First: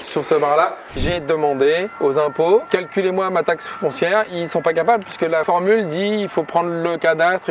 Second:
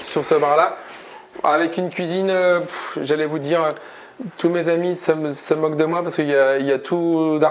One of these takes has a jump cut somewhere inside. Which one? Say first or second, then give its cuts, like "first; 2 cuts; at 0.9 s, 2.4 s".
first; 5 cuts; at 1.0 s, 1.9 s, 2.7 s, 4.3 s, 5.4 s